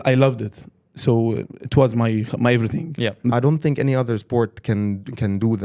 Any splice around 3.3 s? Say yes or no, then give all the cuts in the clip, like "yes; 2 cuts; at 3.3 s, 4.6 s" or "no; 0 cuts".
yes; 1 cut; at 3.3 s